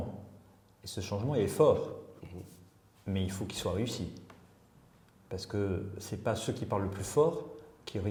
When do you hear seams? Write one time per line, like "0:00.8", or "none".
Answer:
none

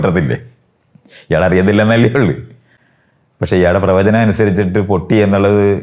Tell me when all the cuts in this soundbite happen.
none

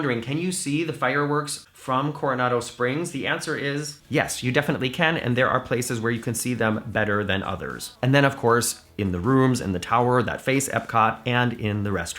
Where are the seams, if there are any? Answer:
0:01.6

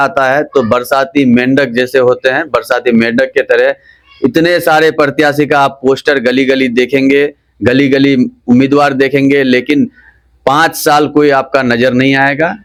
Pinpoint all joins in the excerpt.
none

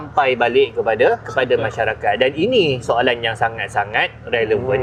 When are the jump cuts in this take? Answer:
none

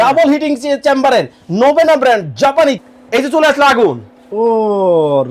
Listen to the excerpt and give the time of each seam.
0:02.9

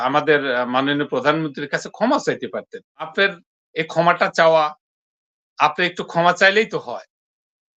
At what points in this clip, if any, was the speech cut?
0:03.1

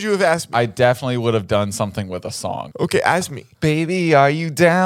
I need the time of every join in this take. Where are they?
0:02.7

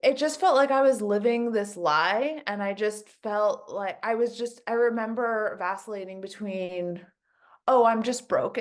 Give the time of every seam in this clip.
none

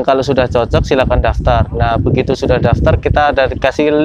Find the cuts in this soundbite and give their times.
none

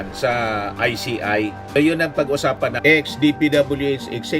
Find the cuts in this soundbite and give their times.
0:02.8

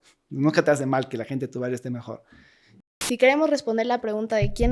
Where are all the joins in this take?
0:03.0

